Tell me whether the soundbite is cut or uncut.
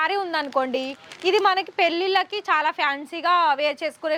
uncut